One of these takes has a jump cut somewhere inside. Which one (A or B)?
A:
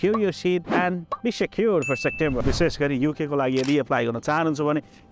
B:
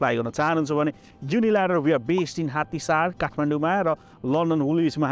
A